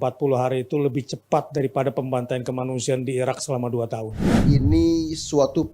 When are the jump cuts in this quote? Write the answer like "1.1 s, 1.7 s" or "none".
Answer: 4.4 s